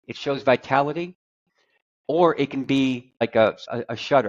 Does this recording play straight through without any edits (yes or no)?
no